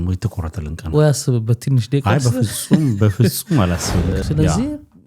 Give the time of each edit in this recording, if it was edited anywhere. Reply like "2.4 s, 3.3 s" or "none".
4.2 s